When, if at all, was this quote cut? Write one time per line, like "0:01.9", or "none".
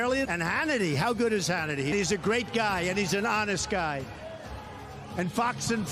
0:01.9

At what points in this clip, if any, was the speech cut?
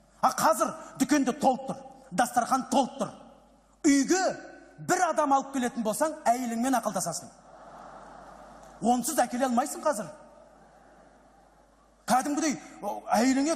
0:08.0

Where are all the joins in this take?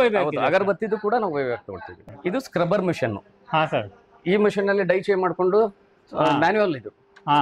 0:02.0

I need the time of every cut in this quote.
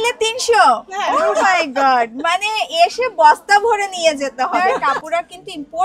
0:01.1
0:04.5

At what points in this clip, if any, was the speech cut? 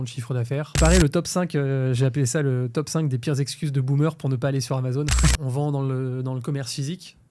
0:00.8
0:05.4

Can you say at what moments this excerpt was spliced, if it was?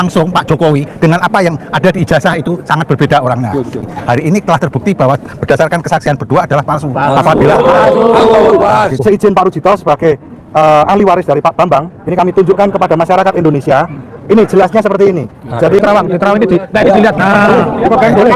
0:03.8
0:09.0
0:15.8

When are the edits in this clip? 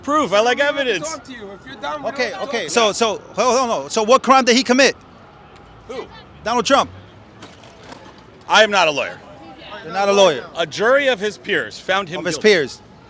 0:02.7

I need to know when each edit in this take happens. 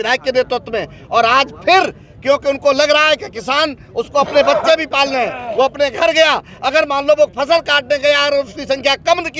none

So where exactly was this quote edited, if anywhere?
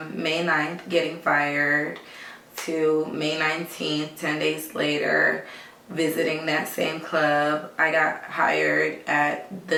none

